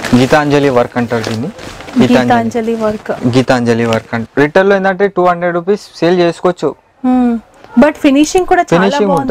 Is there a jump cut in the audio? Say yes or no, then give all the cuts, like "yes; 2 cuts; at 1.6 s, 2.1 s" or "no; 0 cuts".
yes; 1 cut; at 4.2 s